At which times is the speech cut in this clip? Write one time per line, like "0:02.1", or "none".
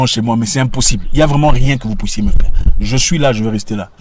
none